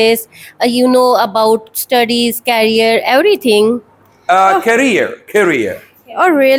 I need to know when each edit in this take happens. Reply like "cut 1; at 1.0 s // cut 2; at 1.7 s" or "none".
none